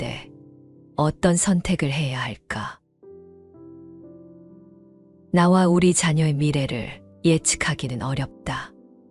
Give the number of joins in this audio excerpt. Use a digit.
2